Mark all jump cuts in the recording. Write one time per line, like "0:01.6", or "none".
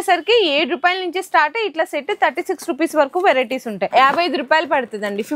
0:03.9